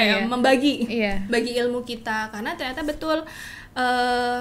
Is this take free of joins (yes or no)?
yes